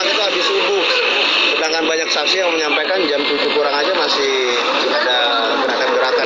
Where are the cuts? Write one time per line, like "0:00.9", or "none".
none